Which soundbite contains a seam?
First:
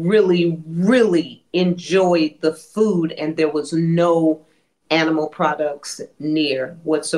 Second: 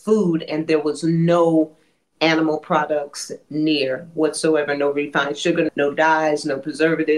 second; 1 cut; at 5.7 s

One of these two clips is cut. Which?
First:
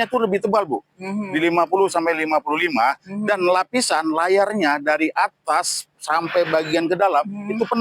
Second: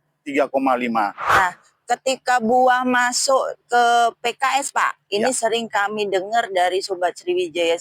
second; 1 cut; at 1.2 s

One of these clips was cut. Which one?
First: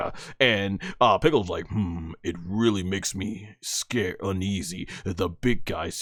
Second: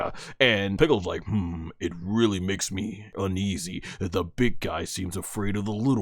second; 2 cuts; at 0.8 s, 3.1 s

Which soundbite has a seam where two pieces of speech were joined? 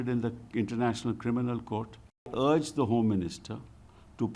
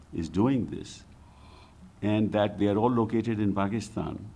first; 1 cut; at 2.3 s

